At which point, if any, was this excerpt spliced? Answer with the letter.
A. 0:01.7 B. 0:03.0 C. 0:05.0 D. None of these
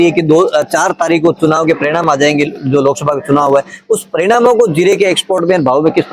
D